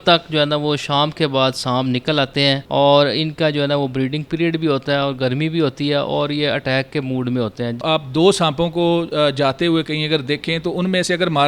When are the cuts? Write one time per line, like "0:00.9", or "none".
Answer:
0:02.6
0:07.8